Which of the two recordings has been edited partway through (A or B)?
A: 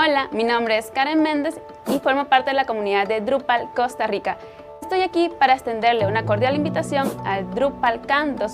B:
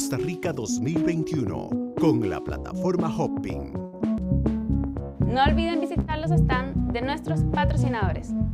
B